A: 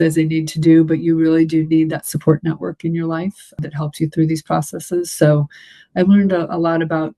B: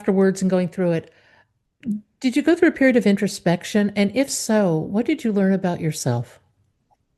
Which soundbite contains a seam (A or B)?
A